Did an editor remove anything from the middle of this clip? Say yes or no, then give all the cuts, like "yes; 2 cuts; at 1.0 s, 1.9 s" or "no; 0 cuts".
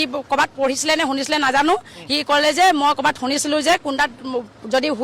no; 0 cuts